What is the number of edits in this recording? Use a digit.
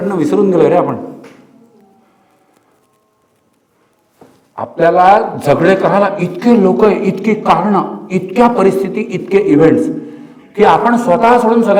0